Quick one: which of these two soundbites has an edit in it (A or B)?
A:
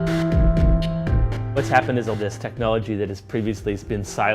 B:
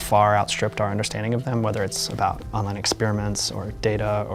A